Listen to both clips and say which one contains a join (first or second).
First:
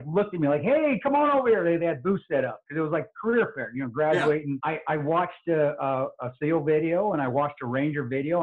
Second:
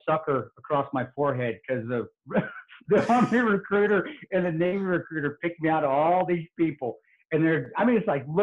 first